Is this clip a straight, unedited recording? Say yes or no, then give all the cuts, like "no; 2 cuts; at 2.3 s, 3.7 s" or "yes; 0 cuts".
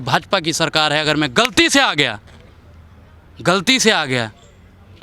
yes; 0 cuts